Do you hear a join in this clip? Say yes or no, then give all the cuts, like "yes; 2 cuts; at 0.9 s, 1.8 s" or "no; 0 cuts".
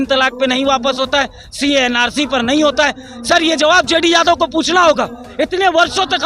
no; 0 cuts